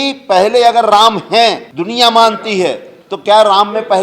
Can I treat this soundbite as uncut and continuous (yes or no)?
no